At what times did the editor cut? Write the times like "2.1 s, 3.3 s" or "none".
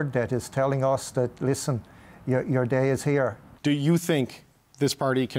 3.5 s

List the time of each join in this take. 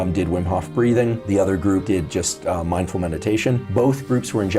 none

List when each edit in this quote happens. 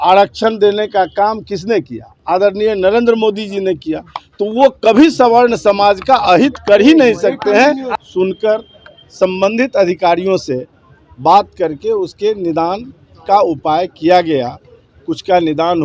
7.9 s

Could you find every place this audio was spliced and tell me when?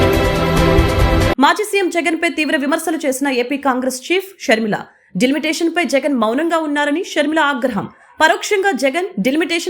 1.3 s

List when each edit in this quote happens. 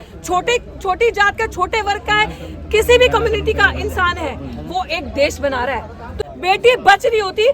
6.1 s

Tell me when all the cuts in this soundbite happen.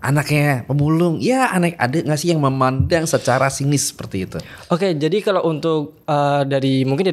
none

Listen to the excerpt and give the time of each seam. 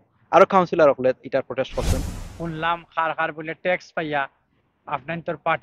2.1 s

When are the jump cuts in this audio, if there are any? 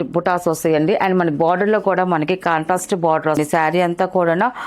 3.4 s

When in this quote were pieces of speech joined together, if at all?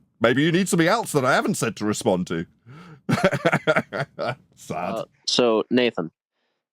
5.2 s

